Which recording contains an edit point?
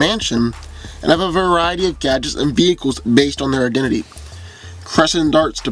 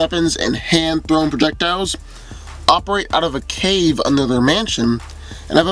second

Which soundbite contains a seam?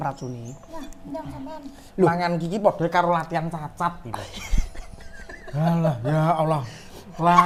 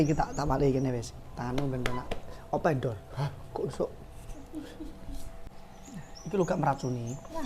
second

